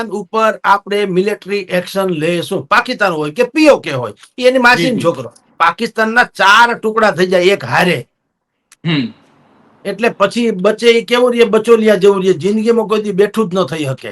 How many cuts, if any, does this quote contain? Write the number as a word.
one